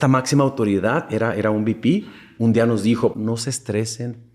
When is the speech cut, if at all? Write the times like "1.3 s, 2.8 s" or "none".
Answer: 3.1 s